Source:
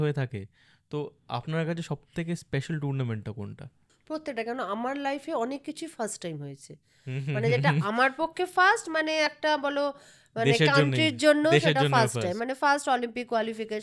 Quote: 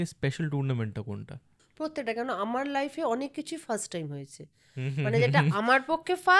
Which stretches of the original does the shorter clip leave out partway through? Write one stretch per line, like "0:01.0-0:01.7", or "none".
none